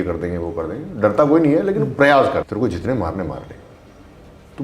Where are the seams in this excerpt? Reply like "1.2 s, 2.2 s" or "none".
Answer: 2.4 s